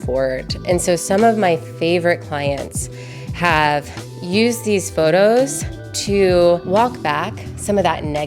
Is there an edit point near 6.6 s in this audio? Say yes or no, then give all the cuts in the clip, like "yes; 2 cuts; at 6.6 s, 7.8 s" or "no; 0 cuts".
yes; 1 cut; at 6.6 s